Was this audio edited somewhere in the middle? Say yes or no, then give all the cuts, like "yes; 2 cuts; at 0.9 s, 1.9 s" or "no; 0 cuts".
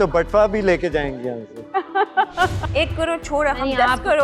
yes; 1 cut; at 2.6 s